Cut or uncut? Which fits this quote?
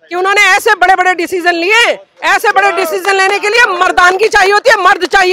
uncut